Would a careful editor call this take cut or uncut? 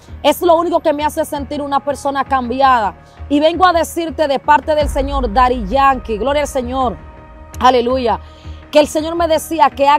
uncut